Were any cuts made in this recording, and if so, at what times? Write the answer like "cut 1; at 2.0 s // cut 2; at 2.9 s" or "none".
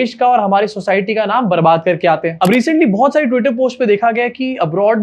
none